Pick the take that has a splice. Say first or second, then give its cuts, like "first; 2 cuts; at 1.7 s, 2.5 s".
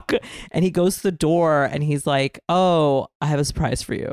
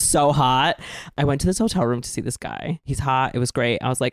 second; 2 cuts; at 1.2 s, 2.9 s